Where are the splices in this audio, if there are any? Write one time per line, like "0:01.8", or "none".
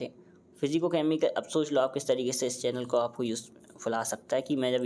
none

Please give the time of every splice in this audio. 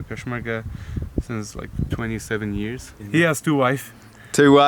0:03.0

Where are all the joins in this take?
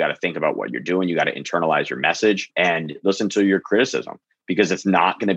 0:02.5

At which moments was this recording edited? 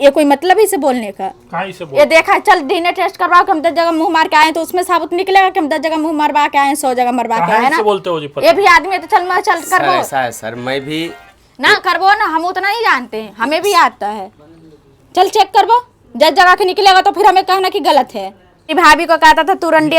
0:18.7

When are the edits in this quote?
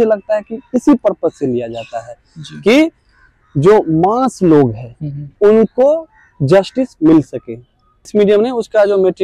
0:08.1

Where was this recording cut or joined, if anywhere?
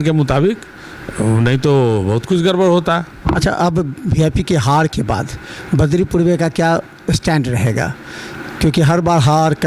none

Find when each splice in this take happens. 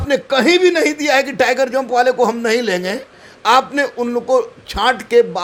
none

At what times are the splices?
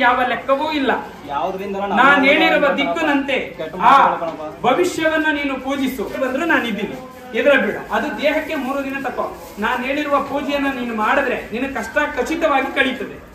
0:06.2

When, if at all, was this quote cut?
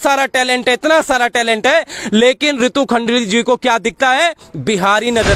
none

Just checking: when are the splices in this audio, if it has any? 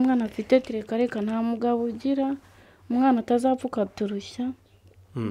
none

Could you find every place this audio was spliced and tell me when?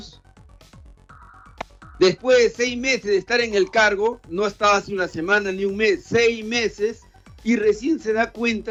none

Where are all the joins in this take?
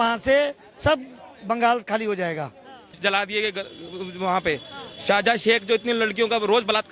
0:02.9

